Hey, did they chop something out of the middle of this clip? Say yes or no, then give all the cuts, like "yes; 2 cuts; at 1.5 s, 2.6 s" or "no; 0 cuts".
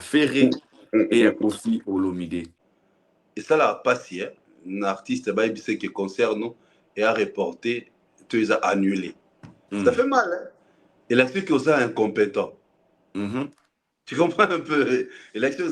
yes; 1 cut; at 2.6 s